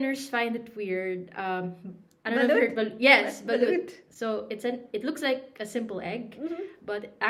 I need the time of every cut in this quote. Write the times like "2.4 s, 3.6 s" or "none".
none